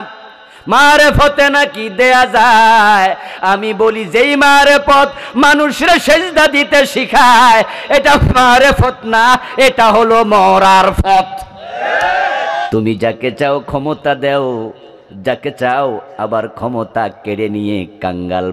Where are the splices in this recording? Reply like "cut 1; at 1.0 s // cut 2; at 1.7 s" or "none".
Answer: cut 1; at 12.7 s